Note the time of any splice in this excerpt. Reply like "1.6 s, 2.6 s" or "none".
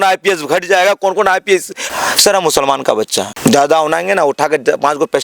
1.8 s, 3.3 s